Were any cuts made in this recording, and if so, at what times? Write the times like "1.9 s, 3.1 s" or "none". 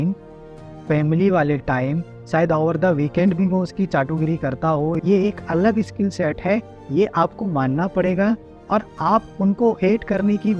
5.0 s